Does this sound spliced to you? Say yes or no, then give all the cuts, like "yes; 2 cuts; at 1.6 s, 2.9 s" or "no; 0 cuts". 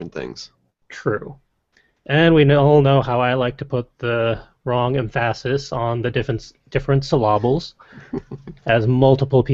no; 0 cuts